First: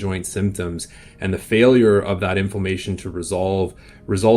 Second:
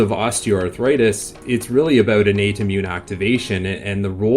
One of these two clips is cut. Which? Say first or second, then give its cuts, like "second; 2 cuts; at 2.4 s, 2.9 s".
second; 1 cut; at 1.4 s